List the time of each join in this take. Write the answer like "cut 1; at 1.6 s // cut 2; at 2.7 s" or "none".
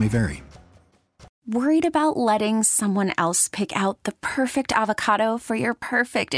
cut 1; at 1.3 s